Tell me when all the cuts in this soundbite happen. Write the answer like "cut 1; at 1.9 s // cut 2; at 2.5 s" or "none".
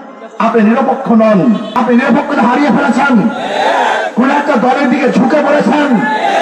cut 1; at 1.7 s